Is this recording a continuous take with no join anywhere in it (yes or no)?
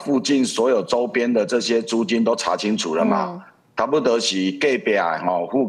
yes